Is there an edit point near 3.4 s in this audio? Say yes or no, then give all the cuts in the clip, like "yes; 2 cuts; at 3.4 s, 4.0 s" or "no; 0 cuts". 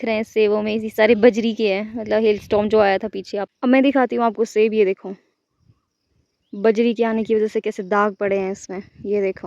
yes; 1 cut; at 3.4 s